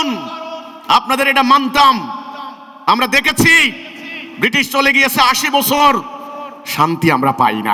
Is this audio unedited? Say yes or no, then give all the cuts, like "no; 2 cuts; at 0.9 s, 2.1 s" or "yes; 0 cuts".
yes; 0 cuts